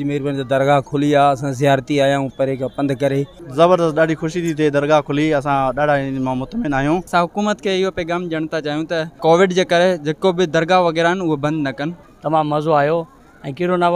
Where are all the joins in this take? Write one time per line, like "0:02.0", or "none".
0:03.4
0:07.1
0:09.1
0:11.9

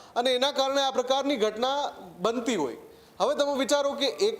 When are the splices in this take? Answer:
none

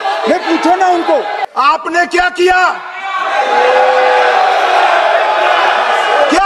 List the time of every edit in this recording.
0:01.4

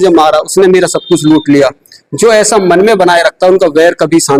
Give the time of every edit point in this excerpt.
none

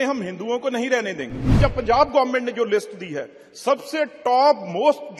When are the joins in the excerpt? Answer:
0:01.6

